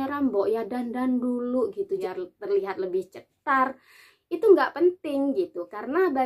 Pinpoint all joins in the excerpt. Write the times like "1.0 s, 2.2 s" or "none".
2.1 s